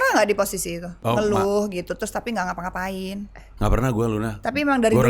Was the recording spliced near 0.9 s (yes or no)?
yes